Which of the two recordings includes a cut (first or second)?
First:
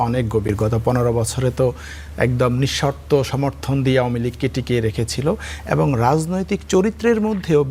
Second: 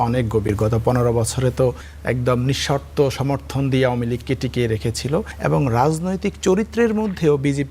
second